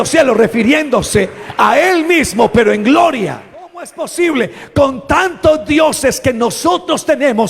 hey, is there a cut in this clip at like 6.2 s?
no; 1 cut; at 4.1 s

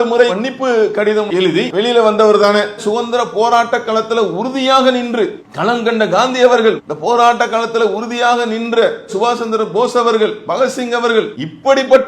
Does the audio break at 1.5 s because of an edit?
yes; 1 cut; at 1.5 s

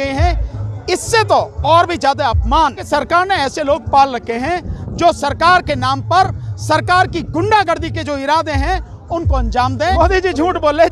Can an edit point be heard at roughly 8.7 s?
no; 2 cuts; at 2.8 s, 9.9 s

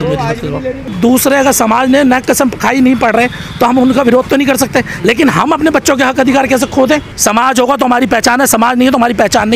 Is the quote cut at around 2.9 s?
no; 2 cuts; at 0.9 s, 7.1 s

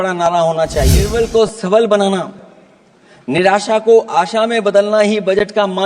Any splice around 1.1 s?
yes; 1 cut; at 1.1 s

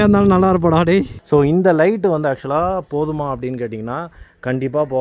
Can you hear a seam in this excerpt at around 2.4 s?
no; 1 cut; at 1.2 s

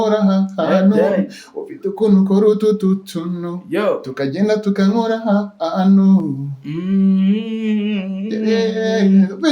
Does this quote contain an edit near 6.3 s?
no; 0 cuts

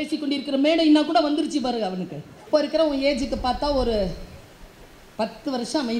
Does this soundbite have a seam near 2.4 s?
yes; 1 cut; at 2.4 s

